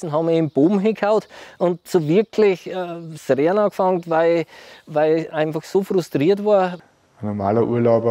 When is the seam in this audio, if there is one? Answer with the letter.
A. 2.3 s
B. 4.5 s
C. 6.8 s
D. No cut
C